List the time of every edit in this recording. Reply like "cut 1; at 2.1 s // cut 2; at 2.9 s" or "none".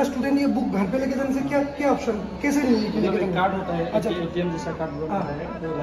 none